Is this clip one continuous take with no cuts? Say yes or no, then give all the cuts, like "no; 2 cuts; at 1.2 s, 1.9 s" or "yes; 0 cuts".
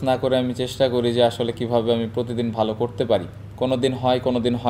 yes; 0 cuts